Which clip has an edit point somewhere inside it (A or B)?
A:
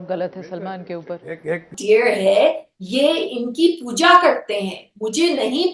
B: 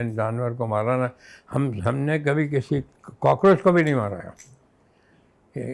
A